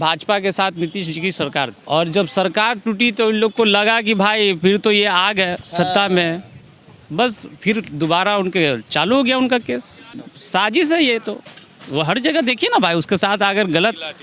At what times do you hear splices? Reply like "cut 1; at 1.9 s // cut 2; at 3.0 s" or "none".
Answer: none